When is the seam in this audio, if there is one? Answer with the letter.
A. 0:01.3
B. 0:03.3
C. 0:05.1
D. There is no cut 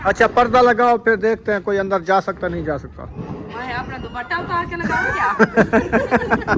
D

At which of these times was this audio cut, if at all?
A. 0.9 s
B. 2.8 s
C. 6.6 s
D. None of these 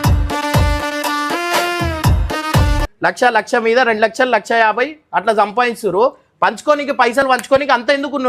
B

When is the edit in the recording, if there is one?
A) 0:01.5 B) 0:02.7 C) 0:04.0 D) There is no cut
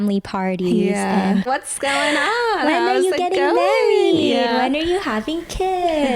A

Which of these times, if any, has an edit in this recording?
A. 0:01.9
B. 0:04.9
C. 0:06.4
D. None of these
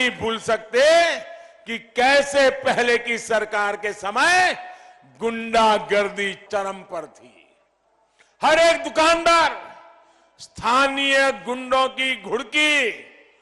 C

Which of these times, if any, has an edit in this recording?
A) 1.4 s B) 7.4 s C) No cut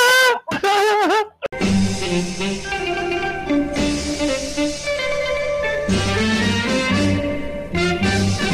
A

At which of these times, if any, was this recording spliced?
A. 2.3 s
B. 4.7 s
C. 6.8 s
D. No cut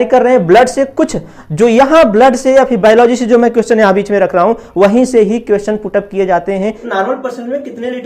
C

